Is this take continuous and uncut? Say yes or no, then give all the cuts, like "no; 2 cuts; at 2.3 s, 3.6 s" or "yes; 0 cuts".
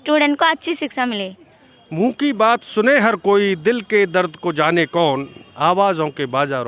yes; 0 cuts